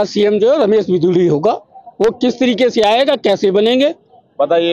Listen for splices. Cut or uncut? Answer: uncut